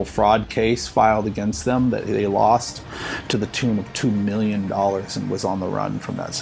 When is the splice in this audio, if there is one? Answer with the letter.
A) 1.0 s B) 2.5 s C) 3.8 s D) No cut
D